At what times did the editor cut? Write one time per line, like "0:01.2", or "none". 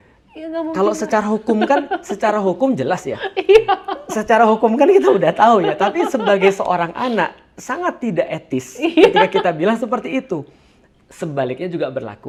none